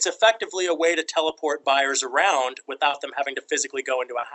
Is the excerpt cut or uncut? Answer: uncut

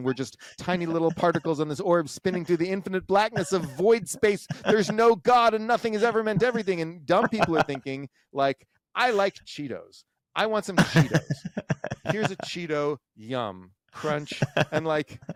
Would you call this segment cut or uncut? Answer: uncut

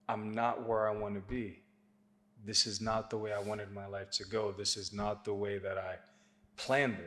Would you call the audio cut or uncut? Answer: uncut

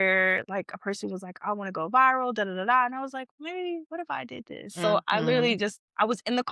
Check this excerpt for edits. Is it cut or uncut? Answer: uncut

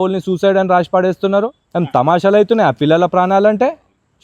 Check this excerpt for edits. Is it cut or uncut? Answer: uncut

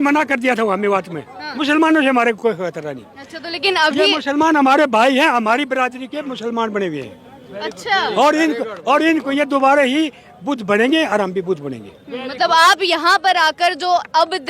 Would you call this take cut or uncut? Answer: cut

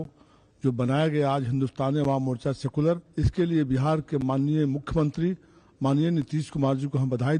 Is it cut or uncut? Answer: cut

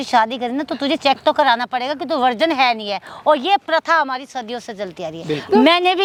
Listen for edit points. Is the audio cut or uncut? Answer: uncut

